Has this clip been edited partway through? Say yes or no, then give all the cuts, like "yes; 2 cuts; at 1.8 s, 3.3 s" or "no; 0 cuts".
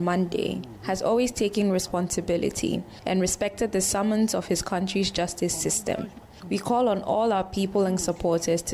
yes; 1 cut; at 6.1 s